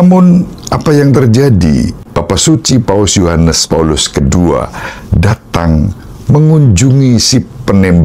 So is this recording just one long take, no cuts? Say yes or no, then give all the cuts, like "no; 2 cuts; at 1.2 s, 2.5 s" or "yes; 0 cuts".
no; 1 cut; at 2.1 s